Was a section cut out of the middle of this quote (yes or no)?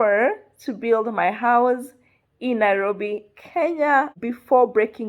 yes